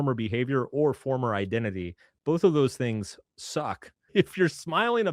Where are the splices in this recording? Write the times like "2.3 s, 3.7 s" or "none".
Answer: 4.1 s